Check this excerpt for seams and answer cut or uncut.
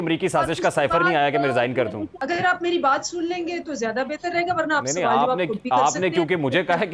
cut